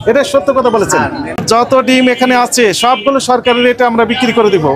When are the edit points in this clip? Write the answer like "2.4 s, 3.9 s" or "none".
1.4 s